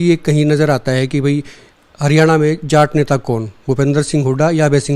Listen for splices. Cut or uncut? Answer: uncut